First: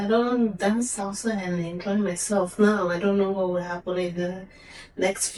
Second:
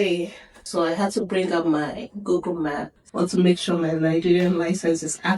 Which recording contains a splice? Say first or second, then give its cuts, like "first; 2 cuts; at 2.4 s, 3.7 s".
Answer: second; 1 cut; at 3.0 s